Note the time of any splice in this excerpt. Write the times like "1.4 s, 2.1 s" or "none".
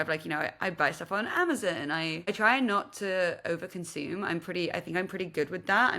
2.2 s